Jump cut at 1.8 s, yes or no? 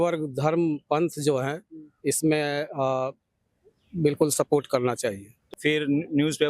no